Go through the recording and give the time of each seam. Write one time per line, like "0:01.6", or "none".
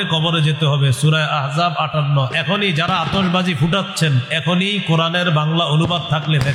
none